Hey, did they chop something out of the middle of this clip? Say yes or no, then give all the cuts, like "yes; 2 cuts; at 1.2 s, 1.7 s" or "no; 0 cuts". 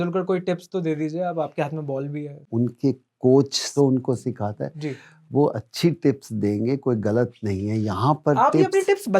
yes; 2 cuts; at 2.4 s, 3.7 s